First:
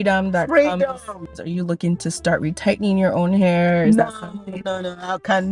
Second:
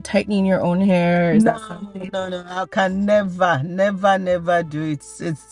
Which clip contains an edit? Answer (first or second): first